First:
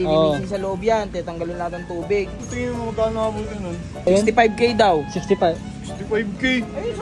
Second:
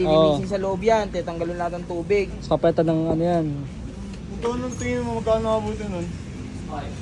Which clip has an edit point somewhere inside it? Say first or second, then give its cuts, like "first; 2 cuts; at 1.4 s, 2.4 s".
first; 2 cuts; at 2.4 s, 4.1 s